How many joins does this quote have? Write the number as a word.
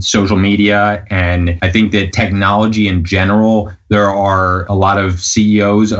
two